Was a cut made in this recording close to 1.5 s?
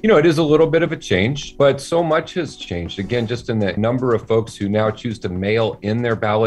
yes; 2 cuts; at 1.5 s, 3.8 s

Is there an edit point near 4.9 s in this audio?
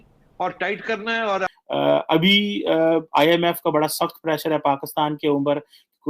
no; 1 cut; at 1.5 s

